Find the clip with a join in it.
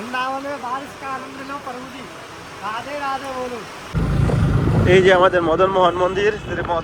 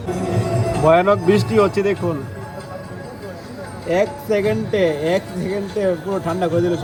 first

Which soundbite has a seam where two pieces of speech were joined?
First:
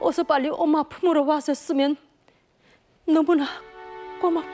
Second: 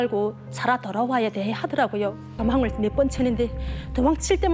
second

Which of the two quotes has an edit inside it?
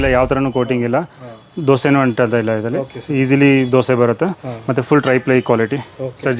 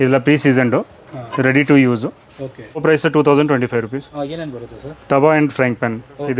second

